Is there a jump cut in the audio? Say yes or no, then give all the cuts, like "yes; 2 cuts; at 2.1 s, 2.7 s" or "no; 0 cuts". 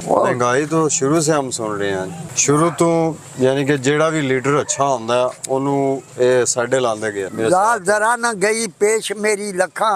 yes; 2 cuts; at 2.3 s, 7.3 s